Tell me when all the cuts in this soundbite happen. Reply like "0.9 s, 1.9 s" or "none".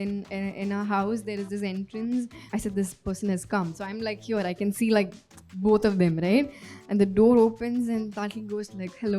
2.4 s